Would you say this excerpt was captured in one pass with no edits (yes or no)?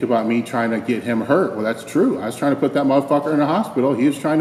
yes